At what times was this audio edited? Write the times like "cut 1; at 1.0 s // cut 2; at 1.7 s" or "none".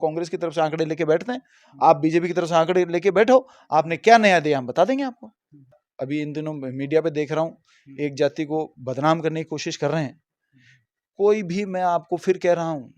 cut 1; at 5.8 s